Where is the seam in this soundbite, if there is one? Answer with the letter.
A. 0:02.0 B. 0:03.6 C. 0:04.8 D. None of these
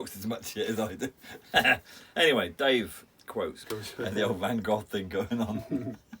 B